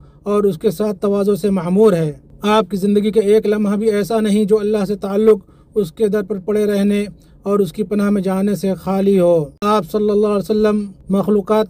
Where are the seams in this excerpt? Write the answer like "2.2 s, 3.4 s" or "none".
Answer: 9.5 s